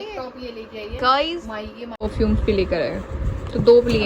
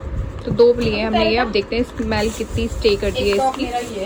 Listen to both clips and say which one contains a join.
first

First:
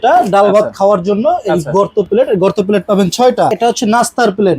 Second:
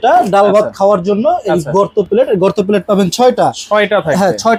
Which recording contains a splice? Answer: first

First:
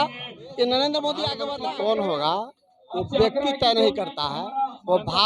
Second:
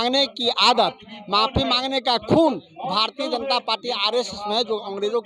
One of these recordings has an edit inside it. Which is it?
first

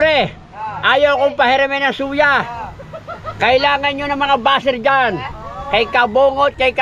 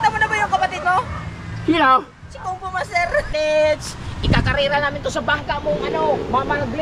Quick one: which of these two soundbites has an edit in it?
second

